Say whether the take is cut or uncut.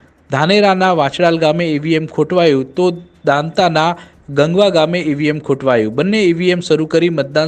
uncut